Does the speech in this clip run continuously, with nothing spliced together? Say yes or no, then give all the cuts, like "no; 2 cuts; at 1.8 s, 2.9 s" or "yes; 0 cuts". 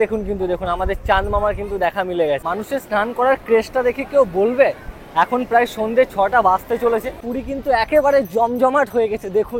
no; 2 cuts; at 2.5 s, 7.3 s